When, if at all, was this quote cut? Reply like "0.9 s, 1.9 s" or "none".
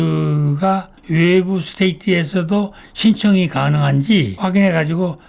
0.9 s